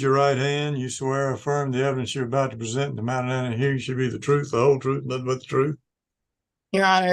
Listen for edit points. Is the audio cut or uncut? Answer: uncut